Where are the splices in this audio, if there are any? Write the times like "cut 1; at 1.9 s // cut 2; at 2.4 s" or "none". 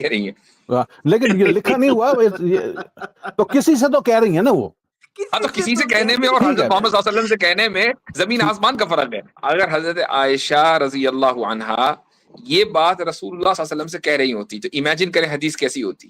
cut 1; at 9.3 s